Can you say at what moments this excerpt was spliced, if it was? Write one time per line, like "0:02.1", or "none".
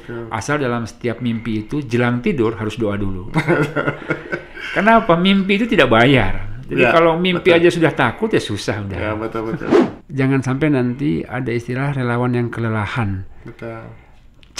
0:09.8